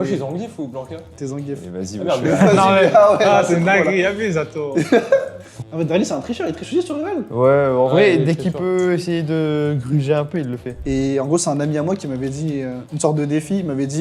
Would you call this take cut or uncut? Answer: cut